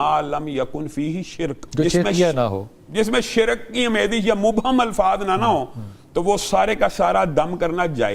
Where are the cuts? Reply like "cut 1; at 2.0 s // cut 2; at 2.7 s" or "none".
cut 1; at 1.6 s